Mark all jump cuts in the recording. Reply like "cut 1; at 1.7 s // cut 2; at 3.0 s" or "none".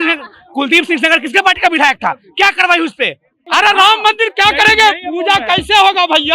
cut 1; at 3.4 s